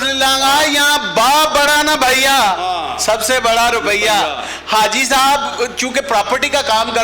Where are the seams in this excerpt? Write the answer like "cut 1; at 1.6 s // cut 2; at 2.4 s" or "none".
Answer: none